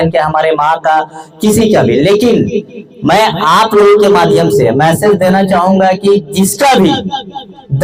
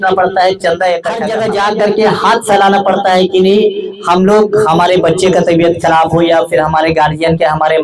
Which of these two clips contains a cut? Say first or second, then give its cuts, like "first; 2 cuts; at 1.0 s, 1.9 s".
second; 1 cut; at 1.2 s